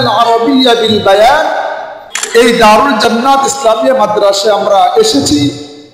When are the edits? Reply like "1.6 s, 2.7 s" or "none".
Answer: 2.1 s